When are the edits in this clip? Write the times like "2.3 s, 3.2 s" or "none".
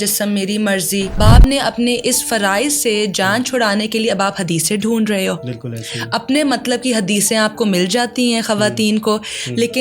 1.2 s

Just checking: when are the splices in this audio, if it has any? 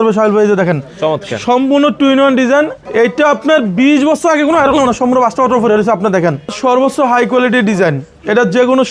2.8 s, 6.5 s

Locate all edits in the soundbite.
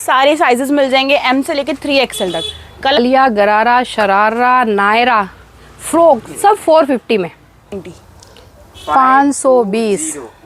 3.0 s, 7.8 s

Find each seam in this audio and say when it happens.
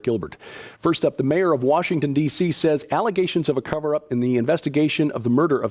3.3 s

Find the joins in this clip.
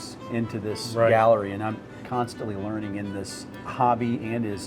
1.9 s, 3.7 s

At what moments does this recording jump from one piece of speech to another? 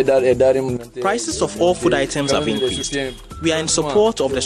none

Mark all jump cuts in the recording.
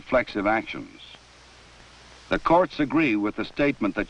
2.4 s

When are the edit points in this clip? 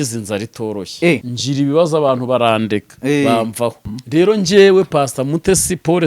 1.3 s, 3.9 s

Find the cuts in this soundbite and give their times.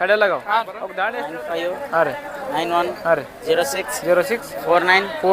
1.2 s

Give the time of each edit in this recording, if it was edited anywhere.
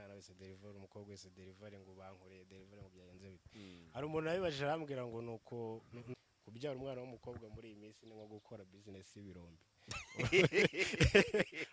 6.1 s

